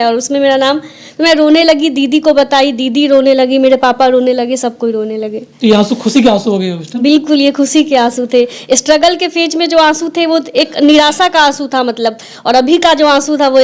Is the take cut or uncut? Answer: uncut